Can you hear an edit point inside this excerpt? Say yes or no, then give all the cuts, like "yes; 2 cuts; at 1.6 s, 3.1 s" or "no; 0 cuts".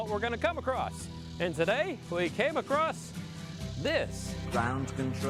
no; 0 cuts